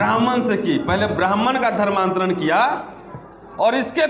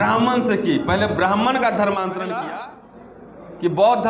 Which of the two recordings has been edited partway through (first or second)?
second